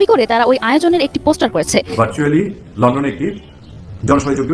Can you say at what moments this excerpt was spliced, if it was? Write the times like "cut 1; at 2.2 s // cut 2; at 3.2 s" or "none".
cut 1; at 1.9 s